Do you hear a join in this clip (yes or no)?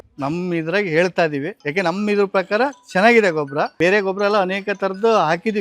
yes